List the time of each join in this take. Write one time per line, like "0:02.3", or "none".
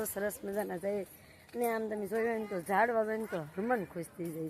none